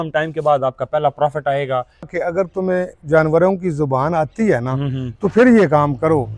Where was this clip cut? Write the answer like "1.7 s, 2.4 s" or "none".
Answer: 2.1 s